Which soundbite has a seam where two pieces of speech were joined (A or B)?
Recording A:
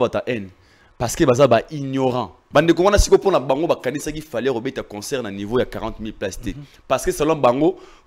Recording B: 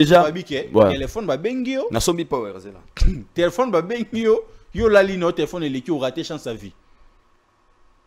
A